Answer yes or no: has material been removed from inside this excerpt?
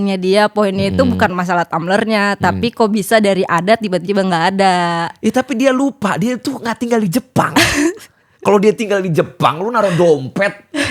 no